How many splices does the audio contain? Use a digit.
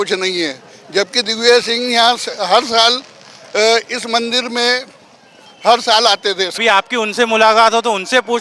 1